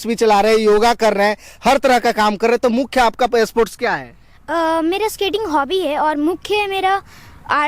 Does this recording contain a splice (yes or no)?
no